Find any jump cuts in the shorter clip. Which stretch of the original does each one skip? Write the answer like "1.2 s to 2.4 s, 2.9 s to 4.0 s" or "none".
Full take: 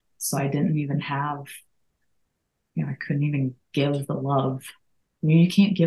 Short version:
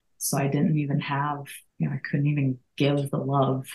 1.6 s to 2.5 s